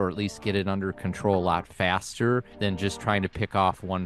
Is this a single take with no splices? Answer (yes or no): no